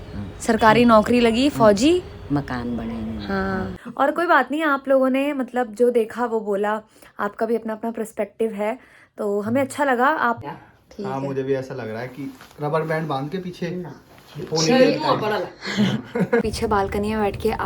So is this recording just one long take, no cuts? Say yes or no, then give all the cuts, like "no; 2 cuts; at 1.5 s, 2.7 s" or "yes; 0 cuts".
no; 3 cuts; at 3.8 s, 10.4 s, 16.5 s